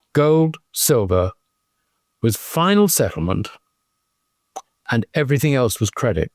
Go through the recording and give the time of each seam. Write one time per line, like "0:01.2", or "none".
none